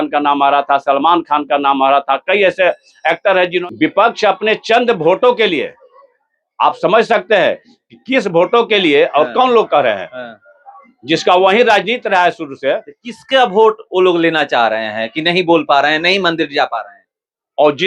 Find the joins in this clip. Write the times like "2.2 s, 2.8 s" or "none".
3.6 s